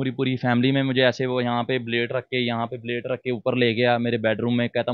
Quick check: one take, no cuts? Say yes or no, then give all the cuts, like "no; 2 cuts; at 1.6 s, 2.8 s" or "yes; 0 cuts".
yes; 0 cuts